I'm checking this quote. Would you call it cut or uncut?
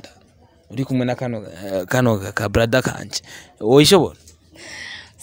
uncut